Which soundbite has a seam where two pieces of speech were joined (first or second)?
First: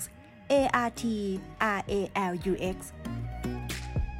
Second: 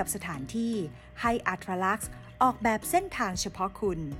first